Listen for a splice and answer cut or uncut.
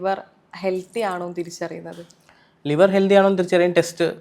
uncut